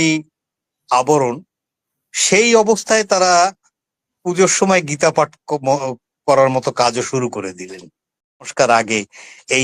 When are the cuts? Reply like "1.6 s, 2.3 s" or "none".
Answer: 8.5 s

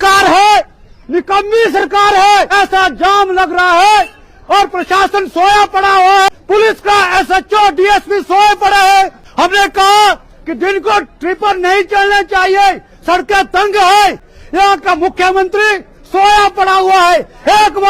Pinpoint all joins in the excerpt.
2.5 s, 6.3 s, 9.2 s, 14.3 s

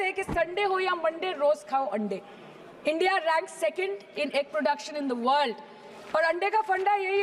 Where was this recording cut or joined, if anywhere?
none

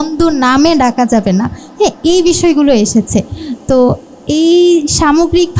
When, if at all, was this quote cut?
none

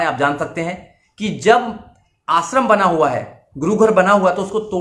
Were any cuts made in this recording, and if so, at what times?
none

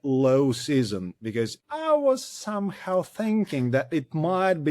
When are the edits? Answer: 1.6 s

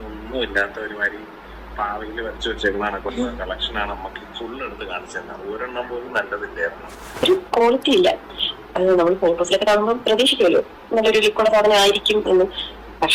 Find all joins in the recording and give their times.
7.0 s

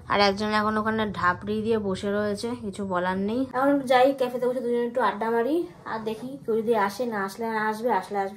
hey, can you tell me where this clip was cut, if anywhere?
3.5 s

